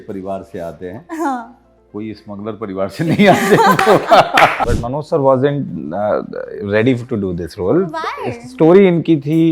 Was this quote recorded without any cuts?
no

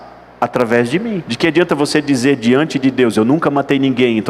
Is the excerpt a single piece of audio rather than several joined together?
no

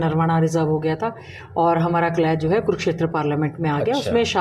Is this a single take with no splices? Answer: yes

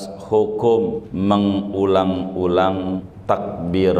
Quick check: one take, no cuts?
no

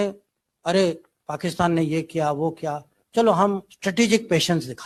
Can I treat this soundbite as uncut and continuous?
yes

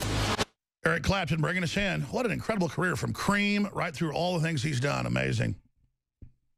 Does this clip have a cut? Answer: no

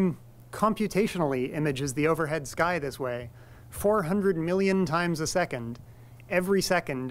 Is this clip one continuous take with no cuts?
yes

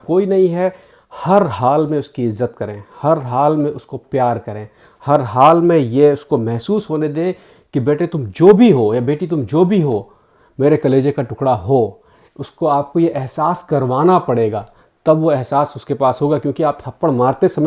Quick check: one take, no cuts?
yes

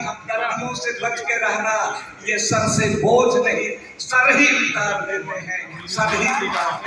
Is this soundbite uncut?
yes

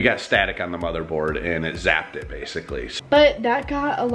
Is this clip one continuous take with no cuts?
no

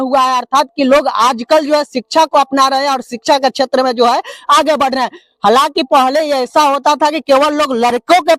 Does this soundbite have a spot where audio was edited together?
no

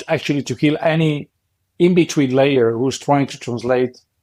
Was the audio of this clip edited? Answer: no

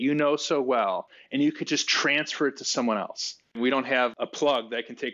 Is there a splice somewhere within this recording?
yes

